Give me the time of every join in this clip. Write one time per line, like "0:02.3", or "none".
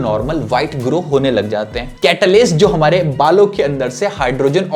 0:01.9